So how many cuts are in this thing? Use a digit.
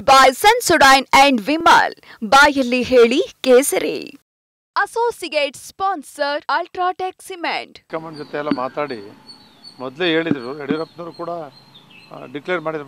1